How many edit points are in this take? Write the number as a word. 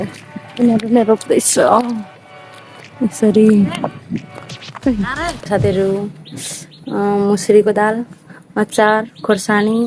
one